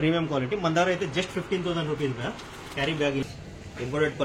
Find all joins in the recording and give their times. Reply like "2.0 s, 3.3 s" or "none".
3.2 s

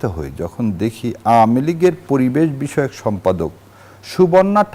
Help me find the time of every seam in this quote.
none

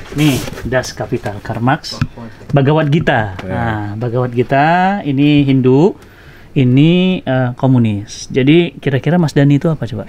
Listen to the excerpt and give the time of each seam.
none

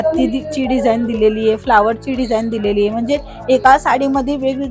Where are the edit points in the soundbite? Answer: none

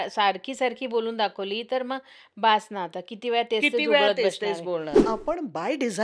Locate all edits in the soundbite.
5.0 s

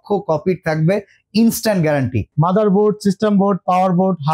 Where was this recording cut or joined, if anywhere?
2.2 s

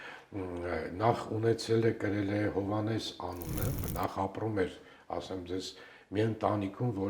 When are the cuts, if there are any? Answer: 3.9 s

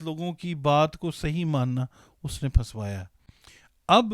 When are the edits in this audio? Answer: none

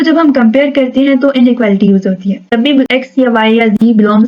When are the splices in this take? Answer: 2.6 s

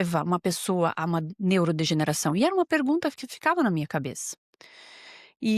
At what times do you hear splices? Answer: none

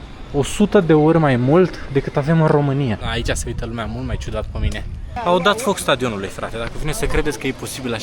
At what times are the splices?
3.0 s, 5.1 s

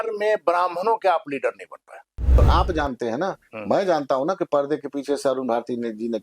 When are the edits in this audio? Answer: 2.4 s

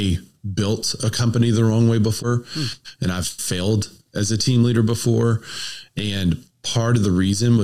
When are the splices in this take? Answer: 2.2 s

